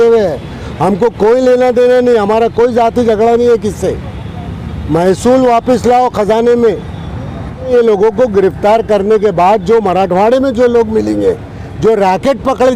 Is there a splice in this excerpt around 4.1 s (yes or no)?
no